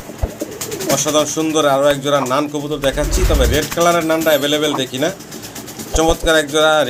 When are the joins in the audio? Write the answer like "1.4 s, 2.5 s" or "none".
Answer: none